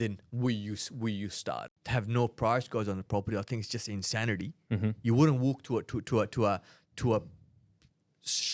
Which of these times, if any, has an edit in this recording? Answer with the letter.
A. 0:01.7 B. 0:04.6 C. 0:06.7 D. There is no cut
A